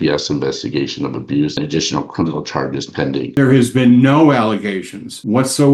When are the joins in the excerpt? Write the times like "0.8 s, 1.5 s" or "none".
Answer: 1.5 s, 3.3 s